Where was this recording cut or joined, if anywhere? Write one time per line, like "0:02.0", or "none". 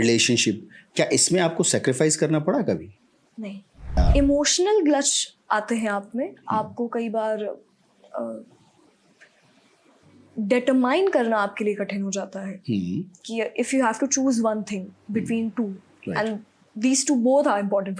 0:04.0